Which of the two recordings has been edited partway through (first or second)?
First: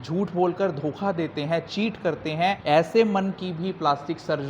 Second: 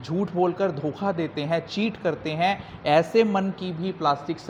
first